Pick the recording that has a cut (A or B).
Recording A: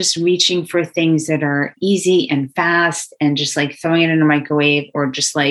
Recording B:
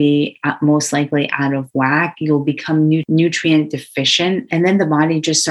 B